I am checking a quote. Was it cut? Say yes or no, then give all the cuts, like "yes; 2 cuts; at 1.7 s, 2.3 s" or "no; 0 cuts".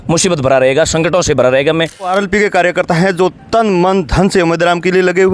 yes; 1 cut; at 2.1 s